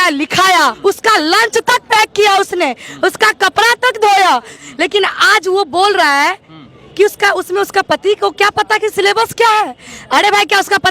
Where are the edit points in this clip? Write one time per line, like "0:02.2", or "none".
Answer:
0:00.8
0:04.6